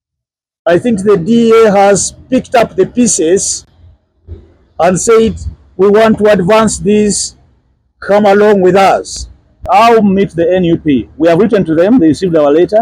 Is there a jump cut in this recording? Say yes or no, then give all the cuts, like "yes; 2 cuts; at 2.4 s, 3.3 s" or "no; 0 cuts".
yes; 1 cut; at 9.6 s